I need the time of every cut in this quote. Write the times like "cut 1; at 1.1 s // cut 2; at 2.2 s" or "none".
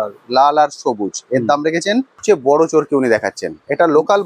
cut 1; at 2.2 s

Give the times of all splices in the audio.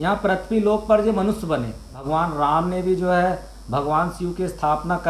cut 1; at 2.0 s

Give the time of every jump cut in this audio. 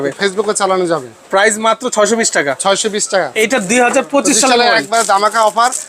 cut 1; at 3.3 s

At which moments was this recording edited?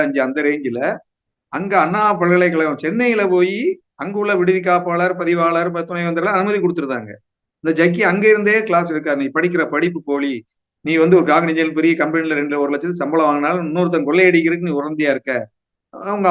none

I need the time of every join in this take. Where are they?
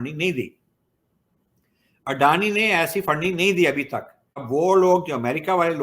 cut 1; at 4.5 s

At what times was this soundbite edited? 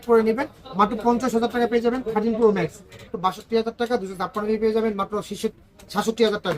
cut 1; at 3.1 s

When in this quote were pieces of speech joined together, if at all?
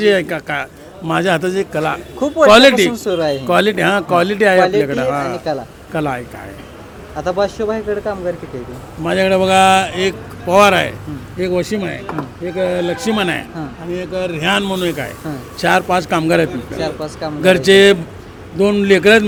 none

